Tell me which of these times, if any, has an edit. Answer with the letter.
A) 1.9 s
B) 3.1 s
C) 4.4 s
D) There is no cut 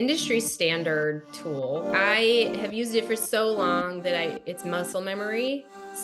A